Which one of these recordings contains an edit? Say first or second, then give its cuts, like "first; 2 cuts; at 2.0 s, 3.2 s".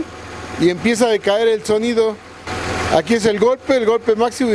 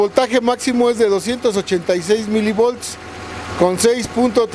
first; 1 cut; at 2.3 s